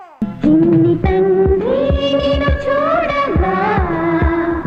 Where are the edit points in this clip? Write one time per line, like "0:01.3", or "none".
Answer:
none